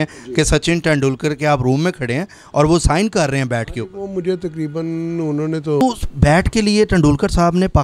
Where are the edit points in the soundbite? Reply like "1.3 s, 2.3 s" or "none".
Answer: 5.8 s